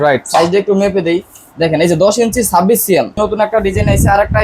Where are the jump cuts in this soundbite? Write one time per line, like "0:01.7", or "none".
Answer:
0:03.2

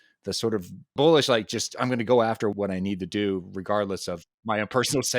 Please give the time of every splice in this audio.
0:02.5

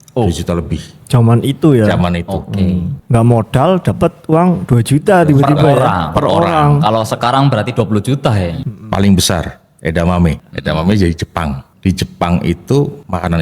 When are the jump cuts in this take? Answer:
0:02.9
0:08.6
0:10.4
0:11.7

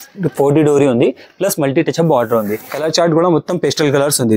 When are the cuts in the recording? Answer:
0:02.6

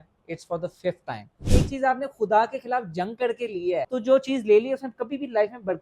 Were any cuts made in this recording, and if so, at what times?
0:01.4

